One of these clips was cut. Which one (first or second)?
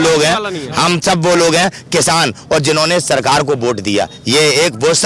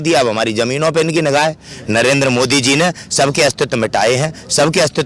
second